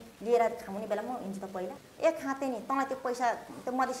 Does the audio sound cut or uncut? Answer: cut